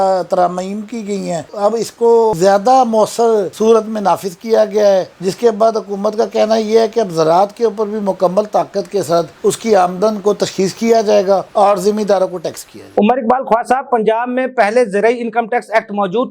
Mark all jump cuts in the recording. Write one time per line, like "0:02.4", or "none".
none